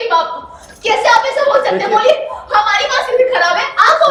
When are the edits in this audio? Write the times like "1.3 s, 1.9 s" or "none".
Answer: none

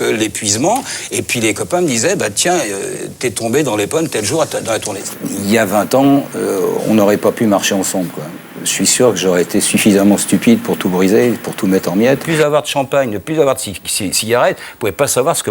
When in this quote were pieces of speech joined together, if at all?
5.0 s, 12.2 s

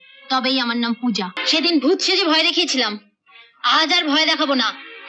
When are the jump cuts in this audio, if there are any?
1.4 s

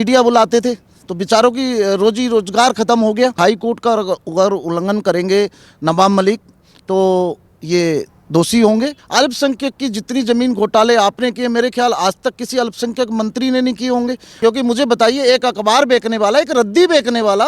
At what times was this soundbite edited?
3.4 s, 9.0 s, 14.2 s

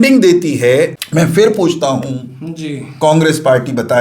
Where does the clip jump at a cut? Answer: 1.0 s

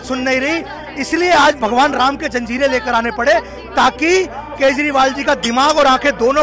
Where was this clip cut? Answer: none

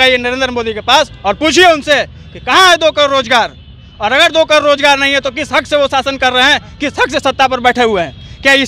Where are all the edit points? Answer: none

